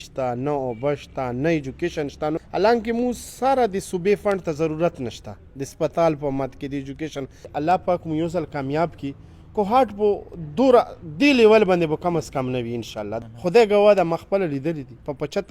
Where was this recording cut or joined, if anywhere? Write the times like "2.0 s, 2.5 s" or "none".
2.4 s, 7.4 s, 13.2 s